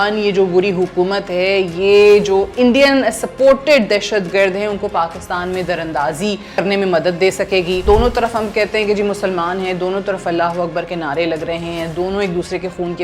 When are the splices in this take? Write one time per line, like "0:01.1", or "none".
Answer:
0:06.6
0:07.8